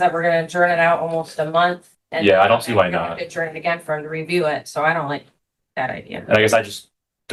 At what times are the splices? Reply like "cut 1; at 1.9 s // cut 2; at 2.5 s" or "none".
none